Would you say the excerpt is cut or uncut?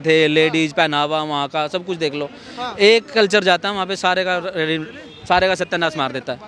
uncut